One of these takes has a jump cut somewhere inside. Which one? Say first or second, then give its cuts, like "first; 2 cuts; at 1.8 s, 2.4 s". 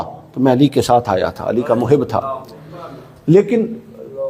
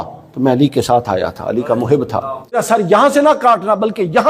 second; 1 cut; at 2.6 s